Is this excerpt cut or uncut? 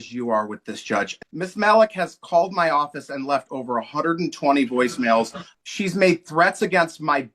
cut